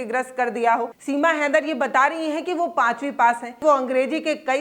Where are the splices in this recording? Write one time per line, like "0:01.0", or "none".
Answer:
0:01.0
0:03.6